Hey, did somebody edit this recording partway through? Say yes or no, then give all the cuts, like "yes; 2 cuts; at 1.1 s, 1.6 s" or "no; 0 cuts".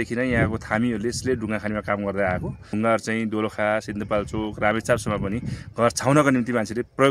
yes; 1 cut; at 2.7 s